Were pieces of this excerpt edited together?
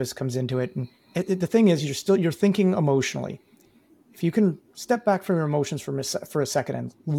no; 0 cuts

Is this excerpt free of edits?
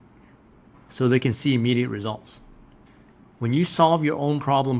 yes; 0 cuts

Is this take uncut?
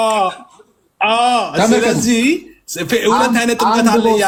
yes; 0 cuts

